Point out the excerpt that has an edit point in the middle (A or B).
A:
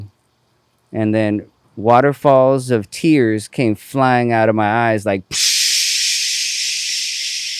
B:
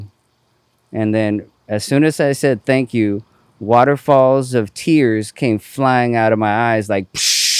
A